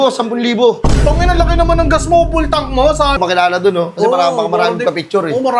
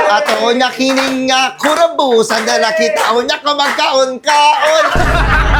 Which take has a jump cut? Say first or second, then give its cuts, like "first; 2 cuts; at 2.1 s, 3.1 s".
first; 1 cut; at 3.2 s